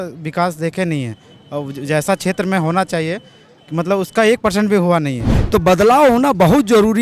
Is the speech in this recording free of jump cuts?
no; 1 cut; at 5.4 s

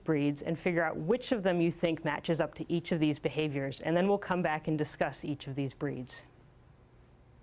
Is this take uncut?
no; 1 cut; at 5.8 s

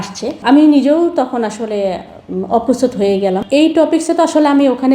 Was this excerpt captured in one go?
no; 1 cut; at 3.4 s

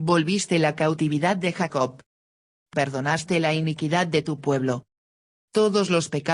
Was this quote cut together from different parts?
no; 0 cuts

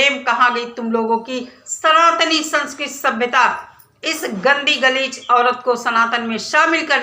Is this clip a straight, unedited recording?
yes; 0 cuts

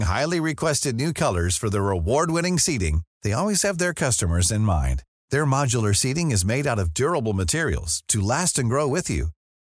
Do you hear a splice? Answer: no; 0 cuts

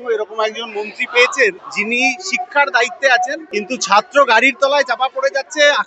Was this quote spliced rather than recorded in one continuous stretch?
yes; 2 cuts; at 1.7 s, 3.4 s

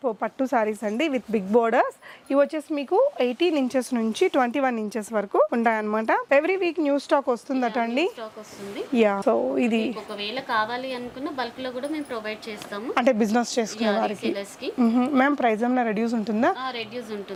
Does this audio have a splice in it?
no; 0 cuts

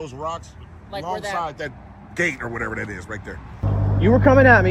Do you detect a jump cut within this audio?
yes; 1 cut; at 3.4 s

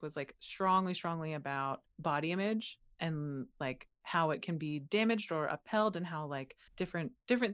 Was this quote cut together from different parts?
no; 0 cuts

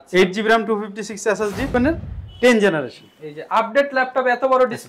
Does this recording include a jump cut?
yes; 1 cut; at 1.7 s

